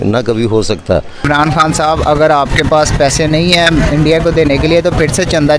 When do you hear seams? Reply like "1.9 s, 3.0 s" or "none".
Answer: 1.2 s